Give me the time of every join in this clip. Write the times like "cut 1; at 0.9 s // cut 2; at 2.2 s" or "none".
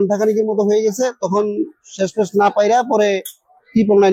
none